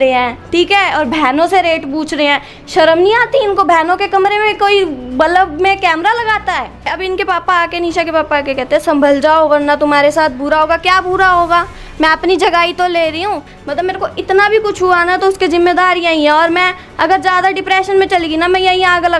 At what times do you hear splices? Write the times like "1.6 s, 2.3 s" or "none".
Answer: 6.9 s, 13.5 s